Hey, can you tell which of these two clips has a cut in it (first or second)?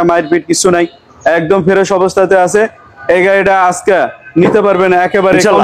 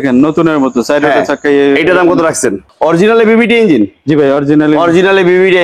second